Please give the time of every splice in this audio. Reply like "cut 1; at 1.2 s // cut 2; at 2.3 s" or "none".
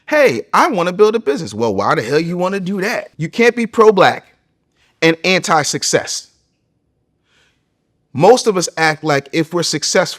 cut 1; at 3.1 s

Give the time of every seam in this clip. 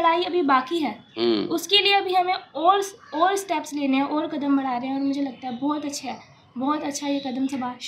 none

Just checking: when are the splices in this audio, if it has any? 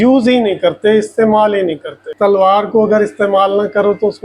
cut 1; at 2.1 s

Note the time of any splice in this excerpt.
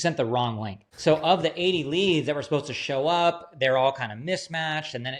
none

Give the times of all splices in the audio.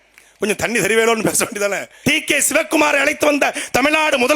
cut 1; at 2.0 s

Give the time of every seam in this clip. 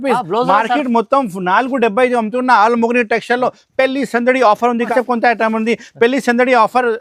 cut 1; at 4.9 s

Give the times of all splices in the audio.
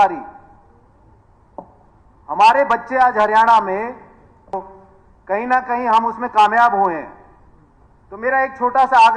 cut 1; at 4.5 s

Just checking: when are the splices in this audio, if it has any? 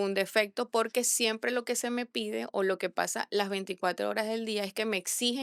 none

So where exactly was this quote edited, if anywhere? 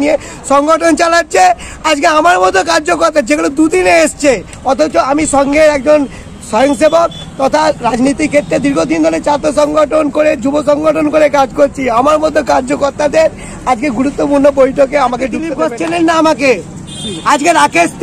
cut 1; at 15.5 s

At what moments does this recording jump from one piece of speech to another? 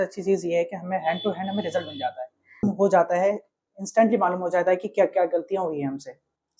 cut 1; at 2.6 s

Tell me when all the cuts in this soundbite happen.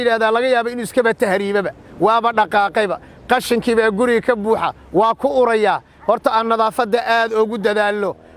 none

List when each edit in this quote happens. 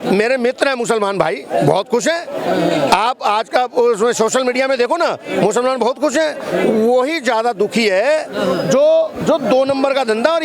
none

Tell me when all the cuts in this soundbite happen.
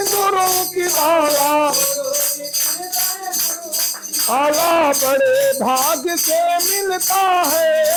none

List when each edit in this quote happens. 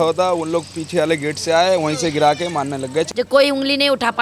cut 1; at 3.1 s

